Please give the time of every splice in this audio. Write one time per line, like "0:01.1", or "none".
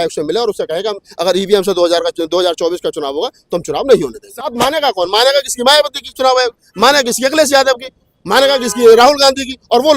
0:04.5